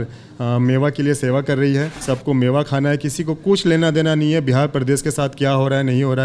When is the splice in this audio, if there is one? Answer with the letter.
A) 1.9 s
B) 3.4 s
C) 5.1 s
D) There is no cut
A